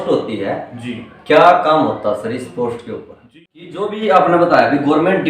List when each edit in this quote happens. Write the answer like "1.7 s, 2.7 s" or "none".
3.2 s